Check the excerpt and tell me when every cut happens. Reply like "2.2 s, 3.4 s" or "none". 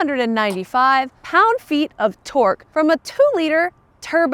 1.2 s, 2.6 s